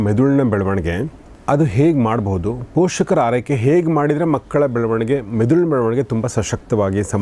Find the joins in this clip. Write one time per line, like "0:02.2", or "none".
none